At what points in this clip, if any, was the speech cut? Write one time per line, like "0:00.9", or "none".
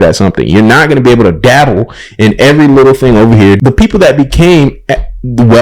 0:03.6